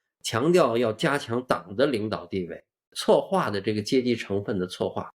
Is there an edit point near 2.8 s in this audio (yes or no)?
yes